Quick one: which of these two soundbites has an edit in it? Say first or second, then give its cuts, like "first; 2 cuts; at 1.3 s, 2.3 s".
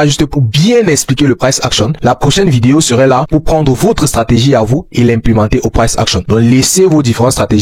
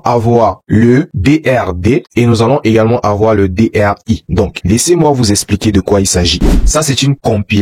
second; 2 cuts; at 4.3 s, 6.5 s